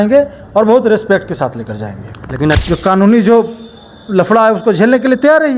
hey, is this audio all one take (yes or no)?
no